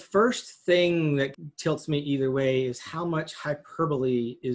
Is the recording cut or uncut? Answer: cut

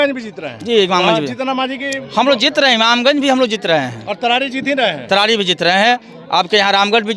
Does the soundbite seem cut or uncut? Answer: uncut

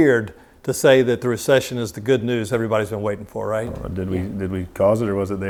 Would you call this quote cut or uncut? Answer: uncut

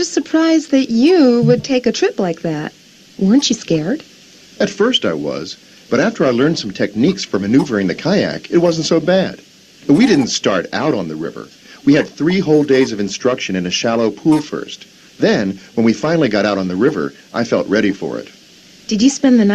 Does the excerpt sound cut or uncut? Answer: cut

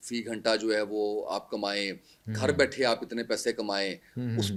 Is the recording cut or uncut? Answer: uncut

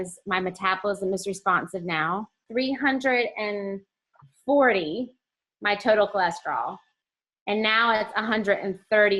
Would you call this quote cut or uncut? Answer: cut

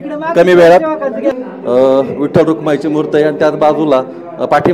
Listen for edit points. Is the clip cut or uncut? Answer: cut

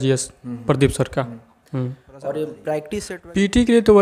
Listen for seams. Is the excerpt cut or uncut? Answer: cut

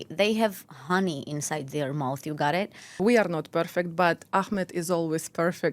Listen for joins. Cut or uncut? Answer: cut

